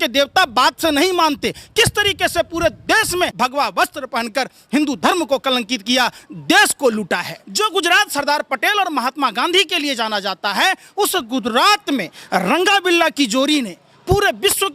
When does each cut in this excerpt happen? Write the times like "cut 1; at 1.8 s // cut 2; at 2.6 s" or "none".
cut 1; at 3.3 s // cut 2; at 7.4 s

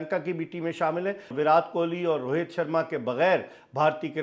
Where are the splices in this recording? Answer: cut 1; at 1.3 s

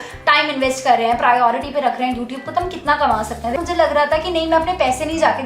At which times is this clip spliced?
cut 1; at 3.6 s

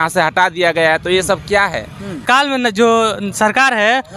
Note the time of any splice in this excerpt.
cut 1; at 2.2 s

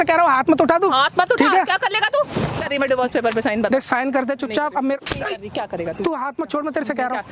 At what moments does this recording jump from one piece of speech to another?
cut 1; at 2.6 s

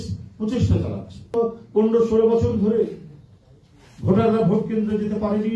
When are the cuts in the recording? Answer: cut 1; at 1.3 s

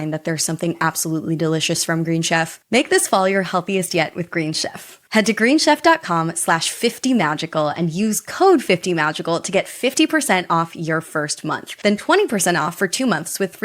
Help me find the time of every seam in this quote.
cut 1; at 2.6 s

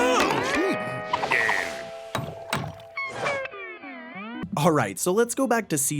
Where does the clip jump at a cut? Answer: cut 1; at 4.4 s

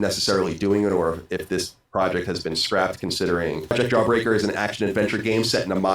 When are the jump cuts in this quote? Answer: cut 1; at 3.7 s

